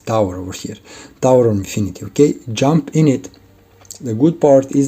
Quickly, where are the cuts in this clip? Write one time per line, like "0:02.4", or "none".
0:03.9